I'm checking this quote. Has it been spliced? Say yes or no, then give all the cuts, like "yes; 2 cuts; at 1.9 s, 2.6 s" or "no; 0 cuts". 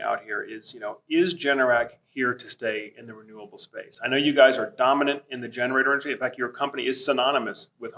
no; 0 cuts